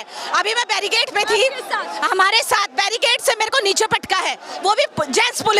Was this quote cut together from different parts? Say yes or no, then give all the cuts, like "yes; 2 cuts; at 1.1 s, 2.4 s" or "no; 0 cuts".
no; 0 cuts